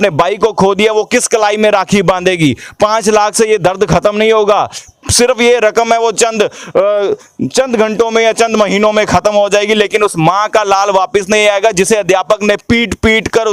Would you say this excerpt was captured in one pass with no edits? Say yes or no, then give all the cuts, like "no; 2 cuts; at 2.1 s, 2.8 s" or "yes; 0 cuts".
yes; 0 cuts